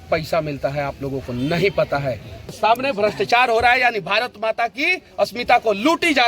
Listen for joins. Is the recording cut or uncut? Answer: cut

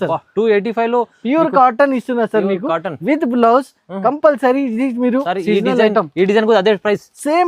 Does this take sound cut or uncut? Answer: uncut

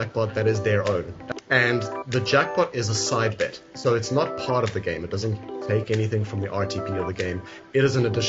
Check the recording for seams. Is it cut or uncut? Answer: cut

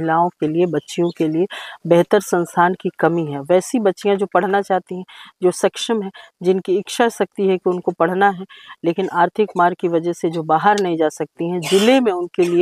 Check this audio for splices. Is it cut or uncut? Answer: uncut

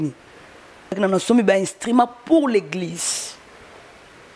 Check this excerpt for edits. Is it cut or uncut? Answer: cut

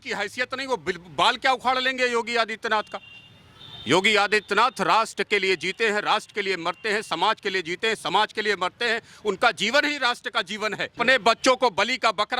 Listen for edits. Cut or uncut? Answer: cut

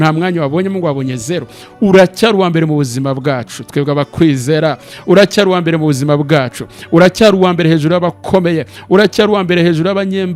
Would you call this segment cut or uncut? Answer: uncut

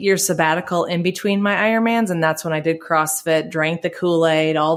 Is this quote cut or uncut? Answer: uncut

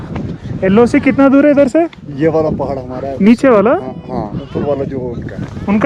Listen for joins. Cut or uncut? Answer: cut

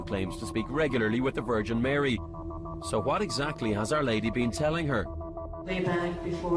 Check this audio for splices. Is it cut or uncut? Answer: uncut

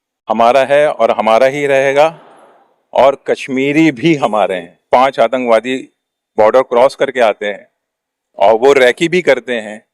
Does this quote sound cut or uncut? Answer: cut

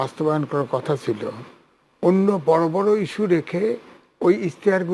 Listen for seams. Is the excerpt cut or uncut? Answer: uncut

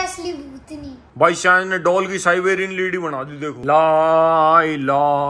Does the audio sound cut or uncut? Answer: uncut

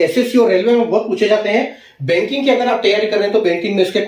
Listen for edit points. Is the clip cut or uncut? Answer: uncut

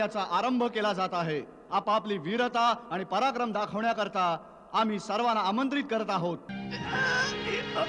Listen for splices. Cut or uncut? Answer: cut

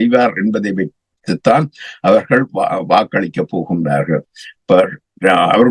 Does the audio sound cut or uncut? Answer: uncut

